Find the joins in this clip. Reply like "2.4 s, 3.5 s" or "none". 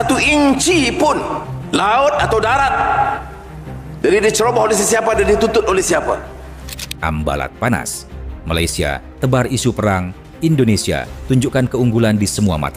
none

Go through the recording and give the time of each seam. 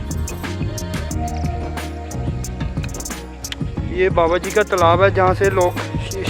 3.9 s

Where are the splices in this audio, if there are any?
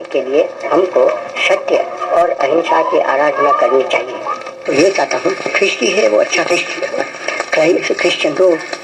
4.6 s

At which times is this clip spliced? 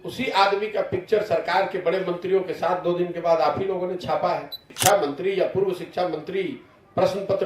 4.7 s

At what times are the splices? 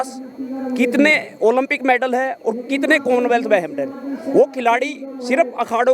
none

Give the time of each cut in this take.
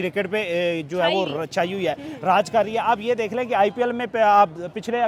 none

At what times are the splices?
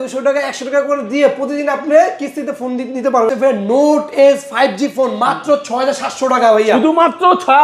3.3 s

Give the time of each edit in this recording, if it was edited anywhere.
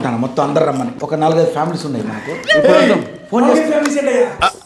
0.9 s

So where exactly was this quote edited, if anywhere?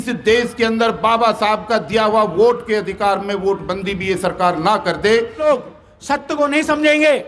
5.4 s

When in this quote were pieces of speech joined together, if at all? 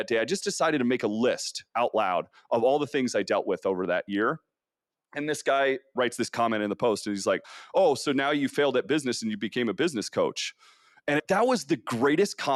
none

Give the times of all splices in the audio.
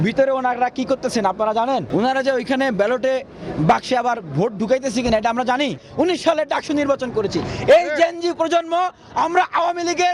1.9 s, 5.8 s

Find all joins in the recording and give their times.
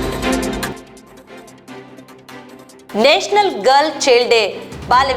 0.7 s, 2.2 s

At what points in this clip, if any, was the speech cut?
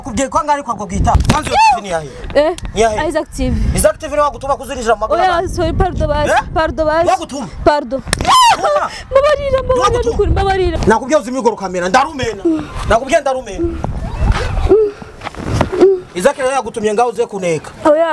1.2 s, 10.8 s

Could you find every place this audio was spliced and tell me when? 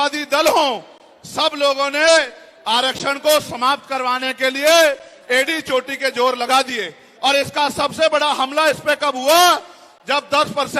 none

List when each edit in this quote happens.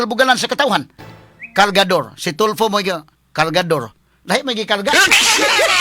1.1 s

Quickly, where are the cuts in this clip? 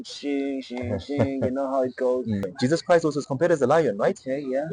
2.5 s

